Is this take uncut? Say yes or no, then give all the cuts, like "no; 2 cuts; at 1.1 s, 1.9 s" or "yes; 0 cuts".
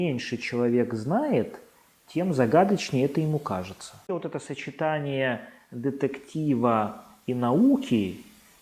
no; 1 cut; at 4.0 s